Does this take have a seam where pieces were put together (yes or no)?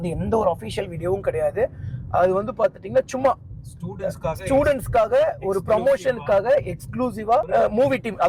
no